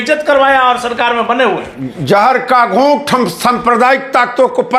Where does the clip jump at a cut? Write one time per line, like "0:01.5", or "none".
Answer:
none